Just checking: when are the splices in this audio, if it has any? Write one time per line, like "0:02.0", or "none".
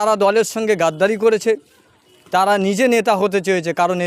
none